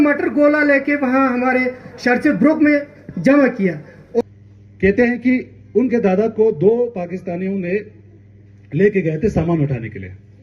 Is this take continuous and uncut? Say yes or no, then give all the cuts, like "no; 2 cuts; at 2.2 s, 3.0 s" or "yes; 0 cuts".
no; 1 cut; at 4.2 s